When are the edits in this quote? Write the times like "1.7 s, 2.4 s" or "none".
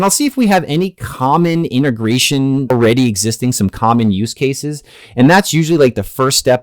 2.7 s